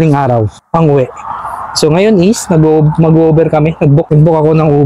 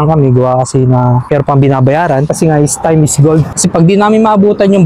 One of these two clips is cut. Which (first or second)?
second